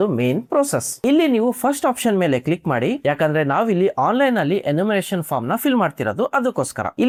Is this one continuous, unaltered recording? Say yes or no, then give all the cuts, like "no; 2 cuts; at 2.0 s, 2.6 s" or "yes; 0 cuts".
yes; 0 cuts